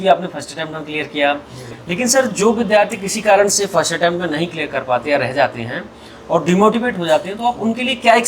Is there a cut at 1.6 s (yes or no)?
no